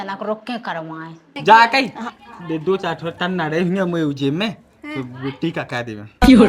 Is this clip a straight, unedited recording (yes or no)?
no